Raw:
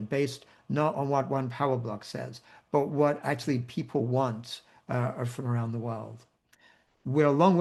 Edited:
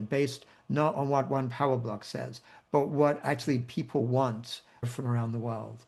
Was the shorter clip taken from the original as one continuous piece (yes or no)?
no